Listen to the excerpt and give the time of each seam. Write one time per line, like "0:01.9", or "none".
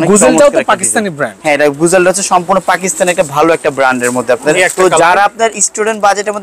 0:04.5